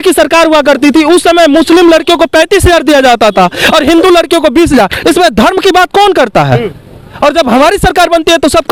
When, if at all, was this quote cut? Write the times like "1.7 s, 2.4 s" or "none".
none